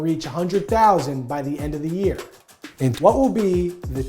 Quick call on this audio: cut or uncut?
cut